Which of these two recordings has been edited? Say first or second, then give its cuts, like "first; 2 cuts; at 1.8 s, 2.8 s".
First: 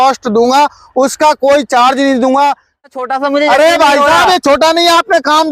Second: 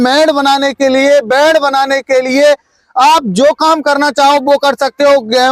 first; 1 cut; at 3.0 s